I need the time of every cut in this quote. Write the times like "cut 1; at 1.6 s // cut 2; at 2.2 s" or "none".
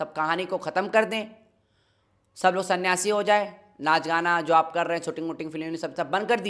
none